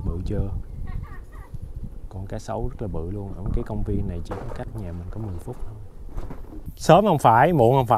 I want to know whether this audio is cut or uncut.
cut